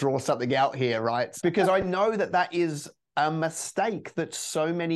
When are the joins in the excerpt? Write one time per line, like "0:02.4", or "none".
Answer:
0:01.3